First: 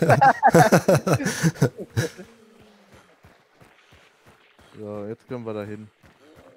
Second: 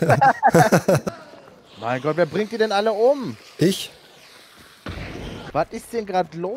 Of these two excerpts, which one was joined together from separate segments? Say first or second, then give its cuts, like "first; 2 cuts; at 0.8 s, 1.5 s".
second; 2 cuts; at 1.1 s, 5.4 s